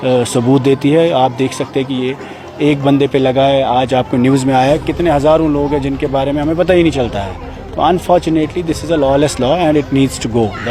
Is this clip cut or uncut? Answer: uncut